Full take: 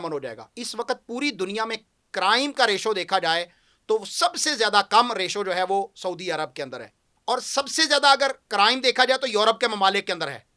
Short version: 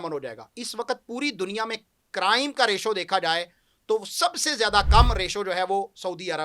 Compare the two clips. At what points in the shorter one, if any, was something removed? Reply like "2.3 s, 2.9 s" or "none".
none